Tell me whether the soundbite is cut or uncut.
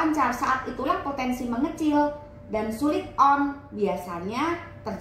uncut